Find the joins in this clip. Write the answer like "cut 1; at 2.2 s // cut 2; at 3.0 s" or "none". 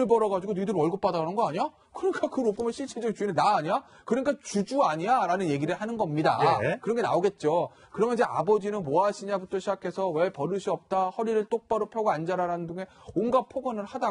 cut 1; at 2.9 s